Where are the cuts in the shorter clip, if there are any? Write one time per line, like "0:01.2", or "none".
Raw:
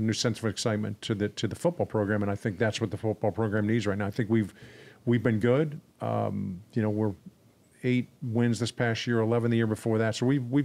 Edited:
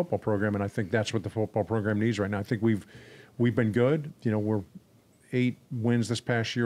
0:04.1